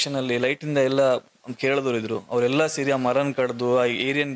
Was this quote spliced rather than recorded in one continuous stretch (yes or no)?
no